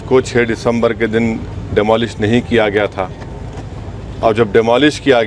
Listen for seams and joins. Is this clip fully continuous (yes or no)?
yes